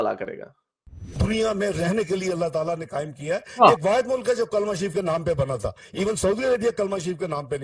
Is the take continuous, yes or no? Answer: no